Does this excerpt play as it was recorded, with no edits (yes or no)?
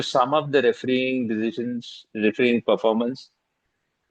yes